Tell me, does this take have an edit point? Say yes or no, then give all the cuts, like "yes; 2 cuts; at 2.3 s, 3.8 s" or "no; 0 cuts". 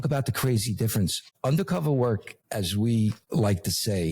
yes; 3 cuts; at 1.3 s, 2.4 s, 3.2 s